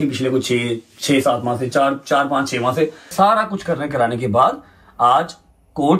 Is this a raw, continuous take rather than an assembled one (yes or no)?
no